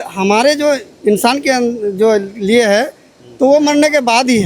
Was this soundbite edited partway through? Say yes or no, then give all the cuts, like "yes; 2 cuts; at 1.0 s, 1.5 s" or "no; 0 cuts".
no; 0 cuts